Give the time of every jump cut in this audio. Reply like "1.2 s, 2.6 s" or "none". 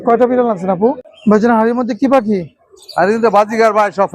1.1 s

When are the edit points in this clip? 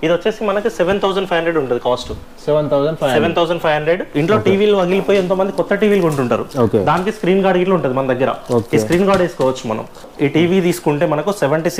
4.1 s, 10.1 s

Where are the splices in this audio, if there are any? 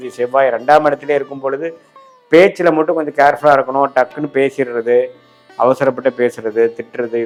none

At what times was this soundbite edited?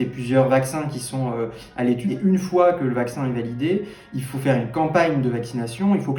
2.1 s

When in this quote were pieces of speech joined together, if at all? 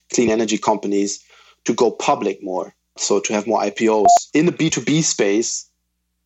3.0 s, 4.2 s

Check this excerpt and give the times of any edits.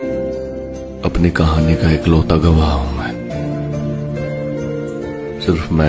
none

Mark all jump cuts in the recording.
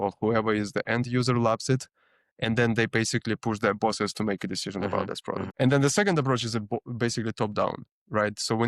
5.4 s

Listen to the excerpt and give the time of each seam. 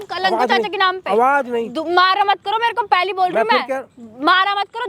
none

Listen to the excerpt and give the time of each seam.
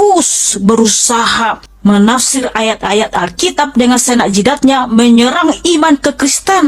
1.7 s

